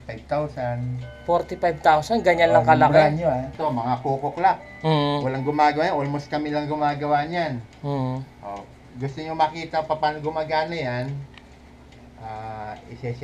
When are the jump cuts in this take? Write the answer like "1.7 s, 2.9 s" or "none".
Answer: 3.5 s